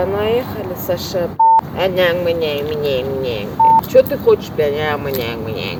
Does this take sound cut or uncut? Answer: uncut